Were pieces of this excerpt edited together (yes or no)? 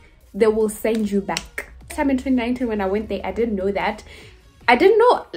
no